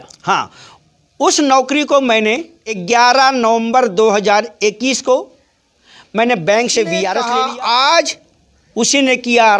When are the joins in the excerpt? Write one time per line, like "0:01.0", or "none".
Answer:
0:02.7
0:07.2